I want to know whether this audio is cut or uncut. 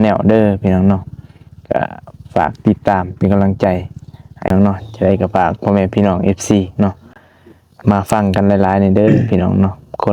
cut